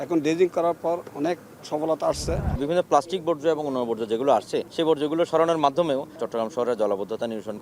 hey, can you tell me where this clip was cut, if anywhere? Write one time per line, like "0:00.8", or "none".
0:02.6
0:04.7
0:06.2